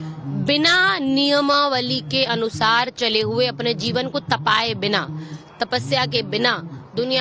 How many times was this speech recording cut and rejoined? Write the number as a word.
zero